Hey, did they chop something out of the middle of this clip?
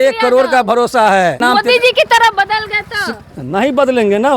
yes; 1 cut; at 1.4 s

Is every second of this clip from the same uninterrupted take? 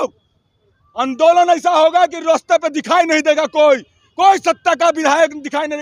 yes; 0 cuts

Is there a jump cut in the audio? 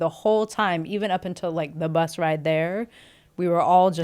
no; 0 cuts

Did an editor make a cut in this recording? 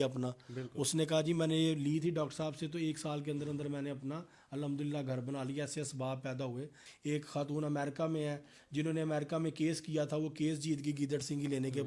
yes; 1 cut; at 6.8 s

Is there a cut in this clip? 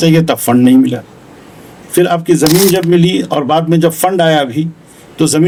no; 0 cuts

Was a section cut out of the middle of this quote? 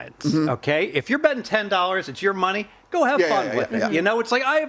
no; 0 cuts

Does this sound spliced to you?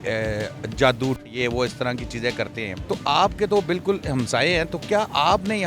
yes; 2 cuts; at 1.3 s, 2.8 s

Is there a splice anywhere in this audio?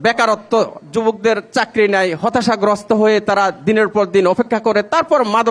no; 0 cuts

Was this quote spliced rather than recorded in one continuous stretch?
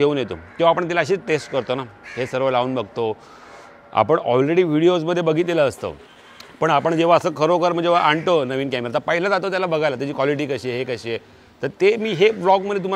no; 0 cuts

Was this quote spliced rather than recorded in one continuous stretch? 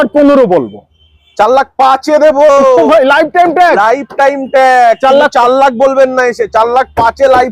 no; 0 cuts

